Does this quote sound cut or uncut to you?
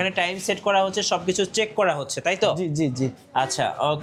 uncut